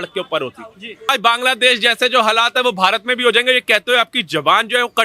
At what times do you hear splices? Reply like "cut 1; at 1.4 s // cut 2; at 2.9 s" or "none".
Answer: cut 1; at 1.1 s